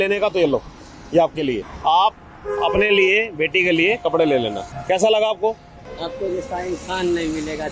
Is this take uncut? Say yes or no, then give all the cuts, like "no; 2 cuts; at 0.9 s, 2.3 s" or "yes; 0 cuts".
no; 3 cuts; at 1.7 s, 4.7 s, 5.8 s